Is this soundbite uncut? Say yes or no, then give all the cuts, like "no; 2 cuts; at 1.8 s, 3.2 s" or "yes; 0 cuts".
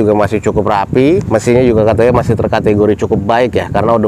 no; 1 cut; at 1.2 s